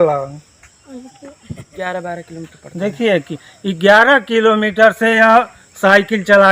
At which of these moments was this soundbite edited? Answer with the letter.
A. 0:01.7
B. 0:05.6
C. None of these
A